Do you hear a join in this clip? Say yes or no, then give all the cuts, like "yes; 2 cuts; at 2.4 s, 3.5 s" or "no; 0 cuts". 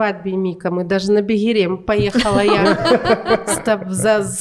no; 0 cuts